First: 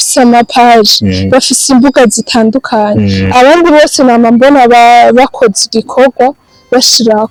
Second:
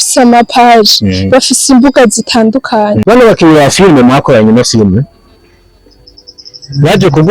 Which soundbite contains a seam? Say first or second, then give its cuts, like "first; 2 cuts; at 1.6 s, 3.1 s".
second; 1 cut; at 3.0 s